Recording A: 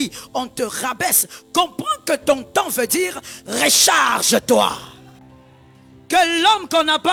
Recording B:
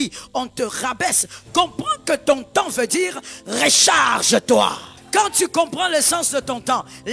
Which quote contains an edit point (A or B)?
B